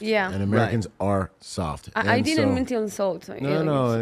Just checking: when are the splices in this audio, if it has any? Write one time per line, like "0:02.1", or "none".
none